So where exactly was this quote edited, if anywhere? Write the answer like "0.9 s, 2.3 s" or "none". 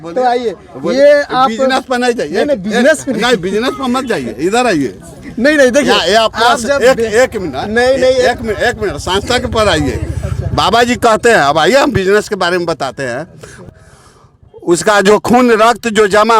13.7 s